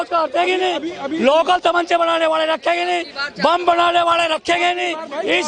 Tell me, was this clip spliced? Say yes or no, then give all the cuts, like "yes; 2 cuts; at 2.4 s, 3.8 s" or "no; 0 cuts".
no; 0 cuts